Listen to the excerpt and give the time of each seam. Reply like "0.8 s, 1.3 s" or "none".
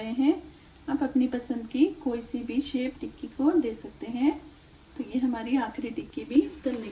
none